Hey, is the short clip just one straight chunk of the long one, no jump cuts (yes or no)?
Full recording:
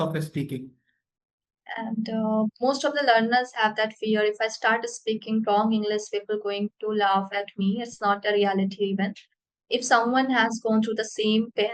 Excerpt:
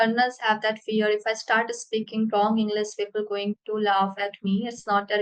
yes